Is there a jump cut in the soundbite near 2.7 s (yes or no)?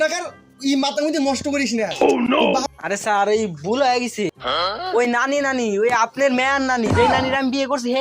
yes